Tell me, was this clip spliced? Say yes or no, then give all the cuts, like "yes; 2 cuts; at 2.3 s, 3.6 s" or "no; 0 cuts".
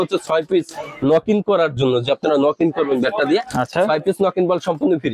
no; 0 cuts